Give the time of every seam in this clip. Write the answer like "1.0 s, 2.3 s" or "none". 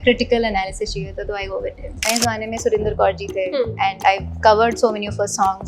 2.1 s